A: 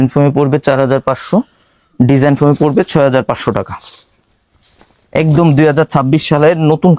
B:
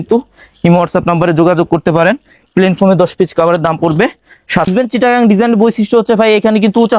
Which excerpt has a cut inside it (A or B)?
B